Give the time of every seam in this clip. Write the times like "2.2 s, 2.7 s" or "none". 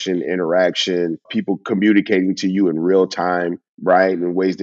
1.3 s